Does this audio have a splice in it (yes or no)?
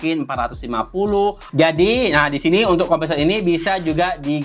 yes